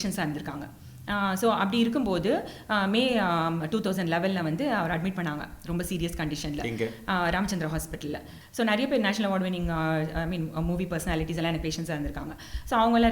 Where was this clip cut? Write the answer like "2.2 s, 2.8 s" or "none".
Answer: 8.3 s